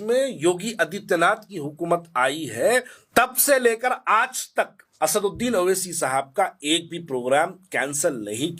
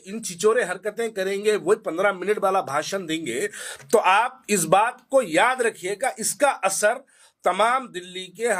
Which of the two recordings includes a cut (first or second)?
first